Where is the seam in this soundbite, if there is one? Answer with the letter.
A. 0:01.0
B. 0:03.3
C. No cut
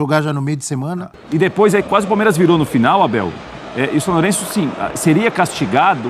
A